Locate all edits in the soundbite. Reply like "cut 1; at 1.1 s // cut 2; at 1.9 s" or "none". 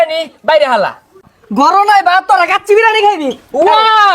cut 1; at 1.2 s

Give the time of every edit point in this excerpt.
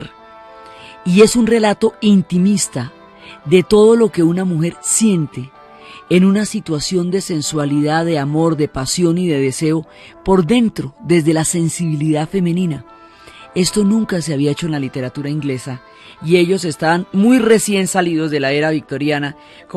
none

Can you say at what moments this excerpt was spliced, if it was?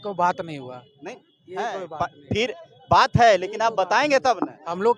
none

